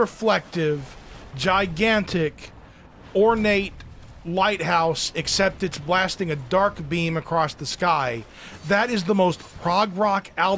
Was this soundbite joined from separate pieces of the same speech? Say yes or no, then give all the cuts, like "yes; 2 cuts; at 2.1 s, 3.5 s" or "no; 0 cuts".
no; 0 cuts